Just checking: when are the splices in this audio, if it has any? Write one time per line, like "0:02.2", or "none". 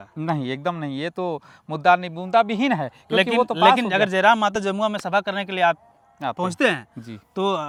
none